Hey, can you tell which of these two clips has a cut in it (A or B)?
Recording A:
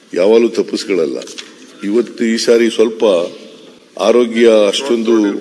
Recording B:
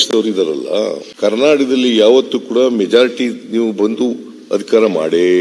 B